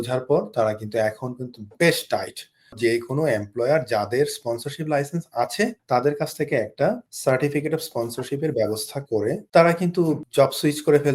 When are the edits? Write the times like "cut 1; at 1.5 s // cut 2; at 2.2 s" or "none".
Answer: cut 1; at 2.8 s // cut 2; at 5.8 s // cut 3; at 7.1 s // cut 4; at 9.4 s // cut 5; at 10.2 s